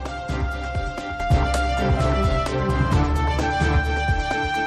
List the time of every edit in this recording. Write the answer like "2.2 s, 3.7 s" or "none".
1.2 s